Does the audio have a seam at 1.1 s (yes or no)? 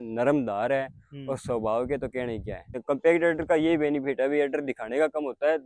no